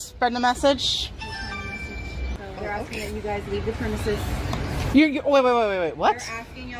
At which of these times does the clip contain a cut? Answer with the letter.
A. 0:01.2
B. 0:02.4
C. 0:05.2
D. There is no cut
B